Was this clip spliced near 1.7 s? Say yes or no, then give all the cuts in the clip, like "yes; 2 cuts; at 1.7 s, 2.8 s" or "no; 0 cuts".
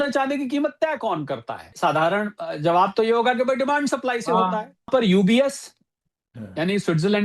yes; 2 cuts; at 1.7 s, 4.9 s